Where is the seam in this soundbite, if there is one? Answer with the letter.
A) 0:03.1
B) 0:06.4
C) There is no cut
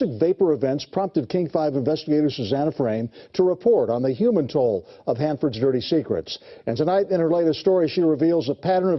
B